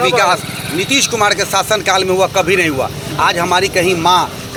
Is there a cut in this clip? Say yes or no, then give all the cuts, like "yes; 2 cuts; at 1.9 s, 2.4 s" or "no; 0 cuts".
no; 0 cuts